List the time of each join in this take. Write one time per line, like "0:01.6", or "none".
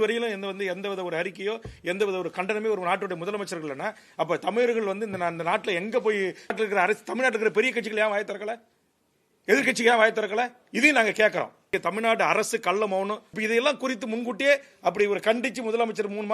0:06.5
0:11.7
0:13.3